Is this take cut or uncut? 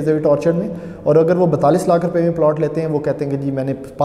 uncut